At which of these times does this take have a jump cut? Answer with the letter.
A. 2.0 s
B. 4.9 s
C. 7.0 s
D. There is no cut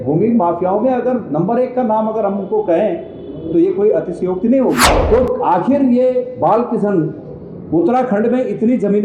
B